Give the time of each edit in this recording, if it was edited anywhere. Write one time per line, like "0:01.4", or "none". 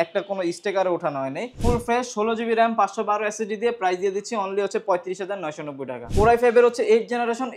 0:01.6
0:06.1